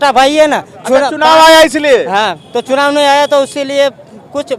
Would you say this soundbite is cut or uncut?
uncut